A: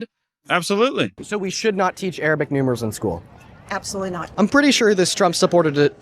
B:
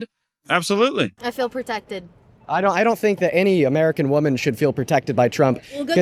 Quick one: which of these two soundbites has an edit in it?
A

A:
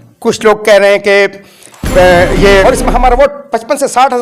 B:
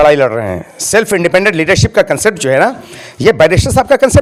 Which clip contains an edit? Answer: A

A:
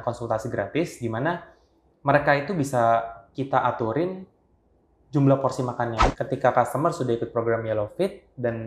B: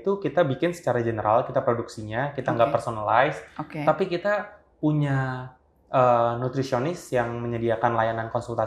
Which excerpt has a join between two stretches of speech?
A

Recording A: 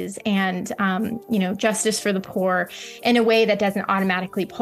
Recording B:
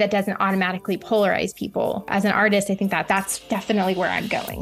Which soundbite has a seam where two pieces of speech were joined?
B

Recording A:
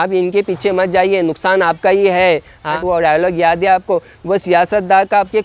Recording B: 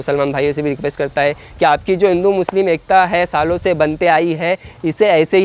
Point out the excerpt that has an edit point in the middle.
A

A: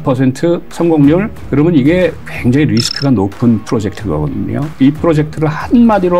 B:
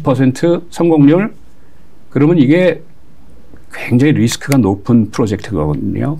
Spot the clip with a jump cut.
A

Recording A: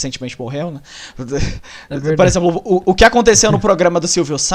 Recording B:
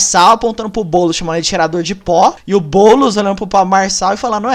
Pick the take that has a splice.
B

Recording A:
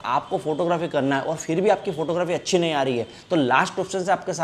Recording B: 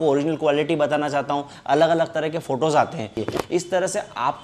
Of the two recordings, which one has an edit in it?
B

